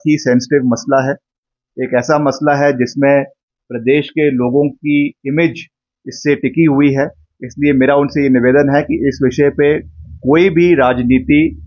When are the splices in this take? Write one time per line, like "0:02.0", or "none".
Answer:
none